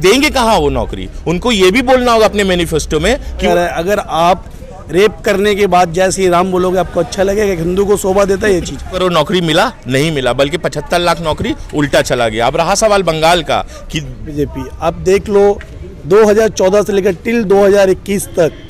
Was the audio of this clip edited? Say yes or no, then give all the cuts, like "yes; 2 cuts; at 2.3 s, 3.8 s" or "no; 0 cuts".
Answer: yes; 3 cuts; at 3.5 s, 8.9 s, 14.3 s